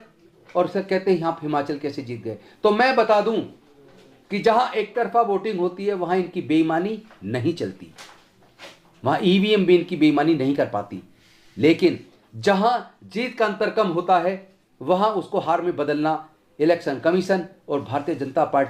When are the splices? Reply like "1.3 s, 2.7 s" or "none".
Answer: none